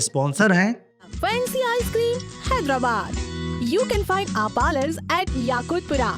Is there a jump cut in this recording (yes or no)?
yes